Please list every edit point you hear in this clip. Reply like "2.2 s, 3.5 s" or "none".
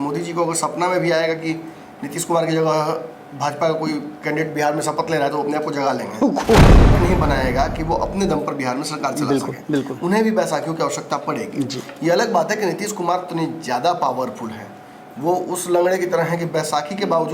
6.8 s